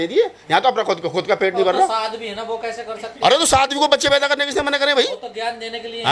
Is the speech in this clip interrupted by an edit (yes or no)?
no